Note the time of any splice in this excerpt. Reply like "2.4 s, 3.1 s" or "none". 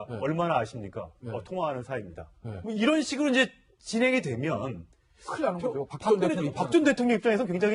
5.7 s